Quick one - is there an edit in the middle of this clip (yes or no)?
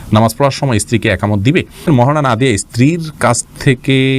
yes